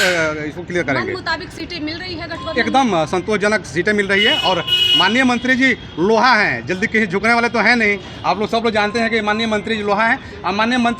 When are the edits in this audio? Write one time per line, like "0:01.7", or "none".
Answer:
none